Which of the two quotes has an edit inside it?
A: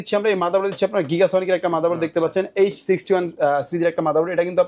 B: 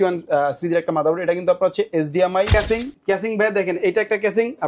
B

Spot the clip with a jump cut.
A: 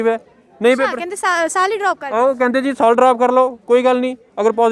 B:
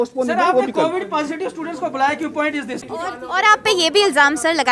B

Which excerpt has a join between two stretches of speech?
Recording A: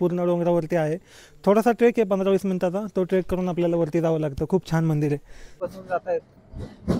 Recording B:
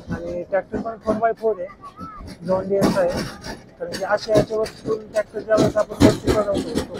A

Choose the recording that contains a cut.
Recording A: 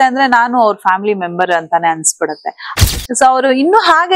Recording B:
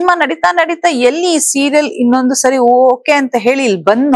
A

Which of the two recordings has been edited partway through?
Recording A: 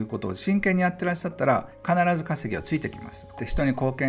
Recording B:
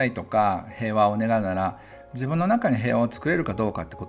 A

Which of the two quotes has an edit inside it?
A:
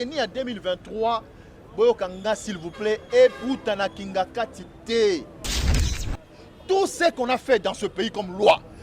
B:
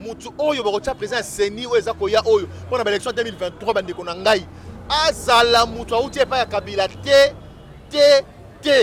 A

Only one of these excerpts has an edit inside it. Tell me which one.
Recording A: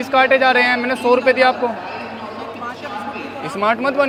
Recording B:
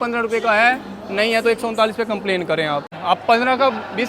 B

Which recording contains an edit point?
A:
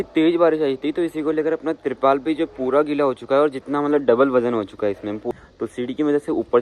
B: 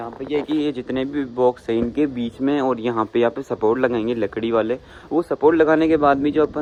A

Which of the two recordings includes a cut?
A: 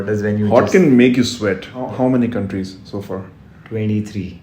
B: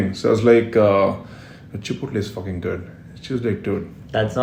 A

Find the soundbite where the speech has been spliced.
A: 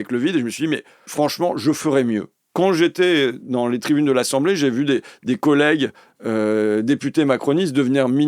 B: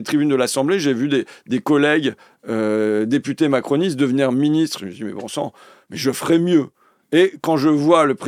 A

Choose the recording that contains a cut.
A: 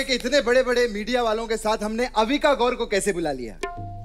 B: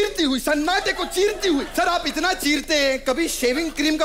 B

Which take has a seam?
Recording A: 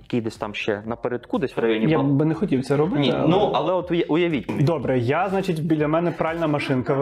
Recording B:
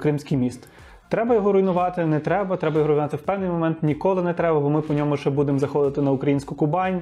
A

